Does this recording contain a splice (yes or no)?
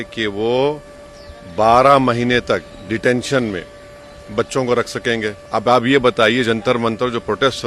yes